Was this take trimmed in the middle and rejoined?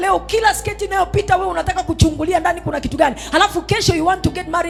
no; 0 cuts

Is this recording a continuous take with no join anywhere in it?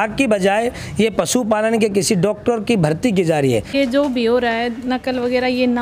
no; 1 cut; at 3.7 s

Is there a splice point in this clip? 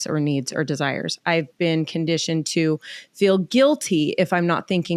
no; 0 cuts

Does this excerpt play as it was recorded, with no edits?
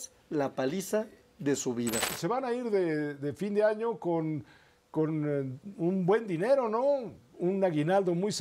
no; 1 cut; at 2.1 s

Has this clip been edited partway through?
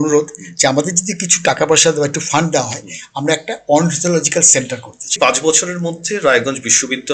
yes; 1 cut; at 5.2 s

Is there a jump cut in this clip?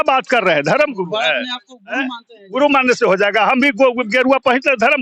no; 0 cuts

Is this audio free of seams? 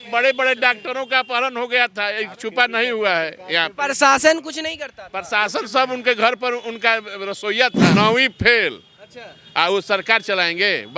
no; 1 cut; at 7.9 s

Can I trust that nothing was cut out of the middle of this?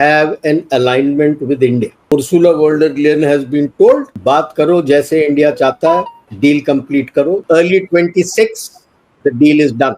no; 4 cuts; at 2.1 s, 4.1 s, 6.2 s, 7.4 s

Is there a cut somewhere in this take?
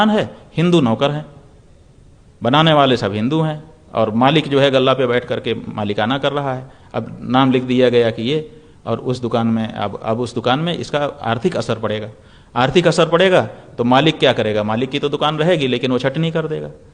no; 0 cuts

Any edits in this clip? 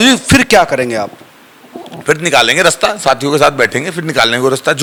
no; 0 cuts

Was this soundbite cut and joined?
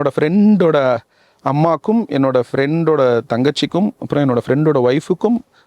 no; 0 cuts

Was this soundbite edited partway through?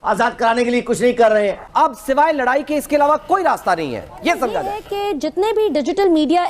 yes; 2 cuts; at 1.6 s, 5.1 s

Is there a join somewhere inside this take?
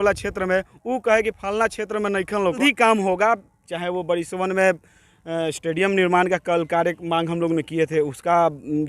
yes; 1 cut; at 2.6 s

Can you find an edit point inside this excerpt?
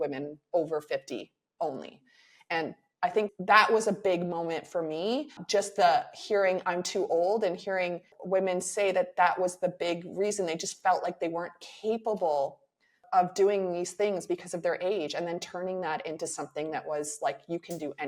yes; 2 cuts; at 5.4 s, 8.1 s

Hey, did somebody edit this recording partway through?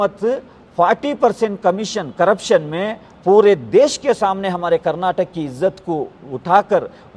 no; 0 cuts

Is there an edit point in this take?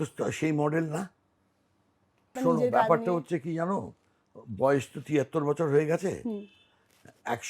yes; 1 cut; at 2.3 s

